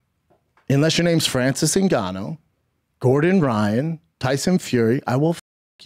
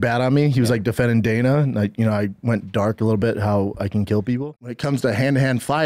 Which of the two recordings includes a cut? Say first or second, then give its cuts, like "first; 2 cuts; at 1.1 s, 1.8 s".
second; 1 cut; at 4.4 s